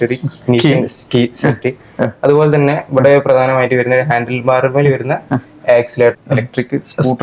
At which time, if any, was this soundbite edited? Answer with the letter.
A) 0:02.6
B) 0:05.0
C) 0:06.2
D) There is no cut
C